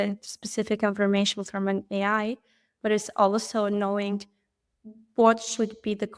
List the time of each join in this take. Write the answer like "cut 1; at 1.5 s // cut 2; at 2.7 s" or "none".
none